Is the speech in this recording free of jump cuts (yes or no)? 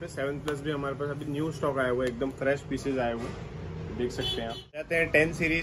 no